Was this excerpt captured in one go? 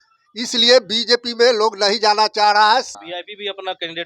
no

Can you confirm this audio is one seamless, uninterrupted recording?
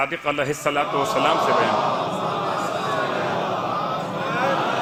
yes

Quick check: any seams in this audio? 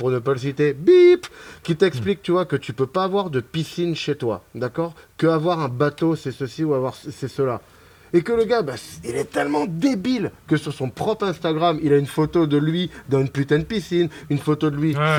no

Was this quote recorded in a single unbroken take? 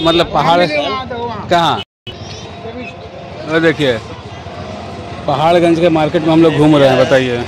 yes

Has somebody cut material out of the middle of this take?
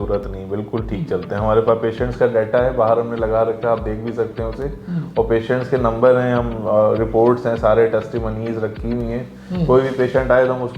no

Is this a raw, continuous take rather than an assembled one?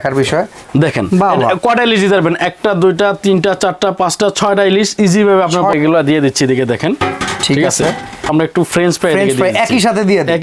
no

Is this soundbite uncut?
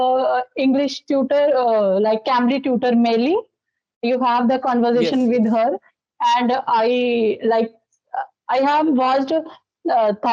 yes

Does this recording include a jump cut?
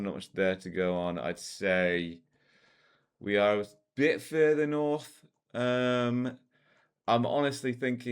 no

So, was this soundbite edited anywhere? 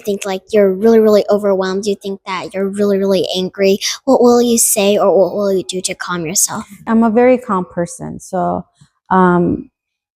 yes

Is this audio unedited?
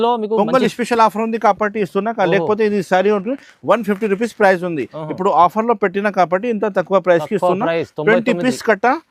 yes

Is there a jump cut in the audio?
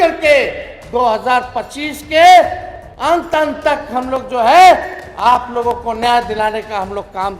no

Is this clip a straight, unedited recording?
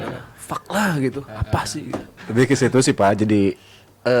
yes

